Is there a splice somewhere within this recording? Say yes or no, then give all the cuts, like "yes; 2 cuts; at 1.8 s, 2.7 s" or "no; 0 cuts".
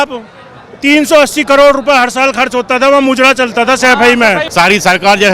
yes; 1 cut; at 4.5 s